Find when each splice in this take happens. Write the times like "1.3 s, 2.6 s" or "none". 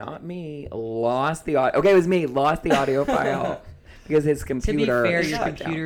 none